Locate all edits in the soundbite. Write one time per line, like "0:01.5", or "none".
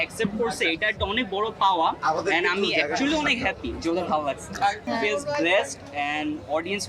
0:04.9